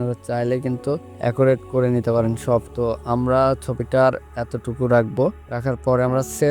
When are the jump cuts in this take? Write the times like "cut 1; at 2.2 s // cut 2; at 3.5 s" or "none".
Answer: cut 1; at 2.7 s